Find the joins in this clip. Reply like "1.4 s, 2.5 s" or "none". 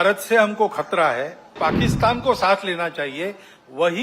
1.6 s

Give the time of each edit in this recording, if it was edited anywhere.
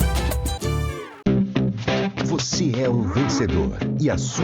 1.0 s

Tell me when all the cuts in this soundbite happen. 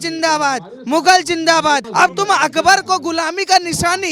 1.9 s

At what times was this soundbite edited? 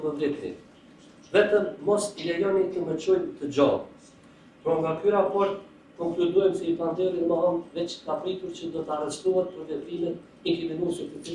none

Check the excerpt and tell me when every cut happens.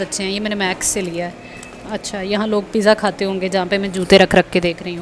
none

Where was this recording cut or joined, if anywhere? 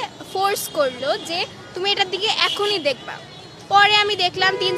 none

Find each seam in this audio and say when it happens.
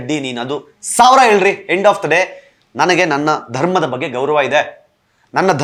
none

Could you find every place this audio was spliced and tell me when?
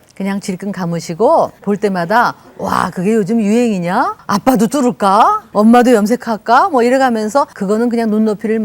1.6 s, 4.2 s, 5.4 s, 7.6 s

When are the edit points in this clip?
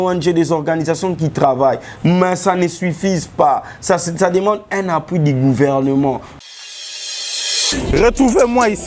6.3 s

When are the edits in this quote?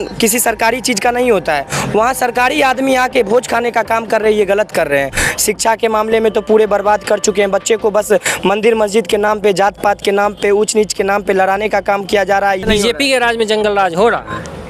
5.1 s, 12.6 s

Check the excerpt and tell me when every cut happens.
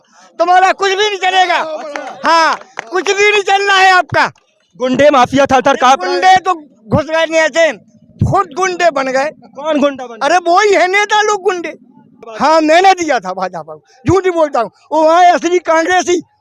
12.3 s

